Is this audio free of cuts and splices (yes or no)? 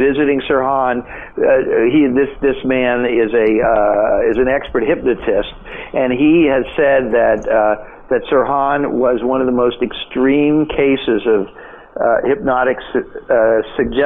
yes